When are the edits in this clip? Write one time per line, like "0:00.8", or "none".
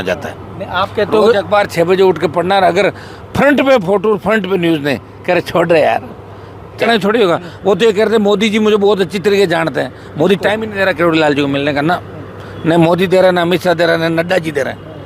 0:06.8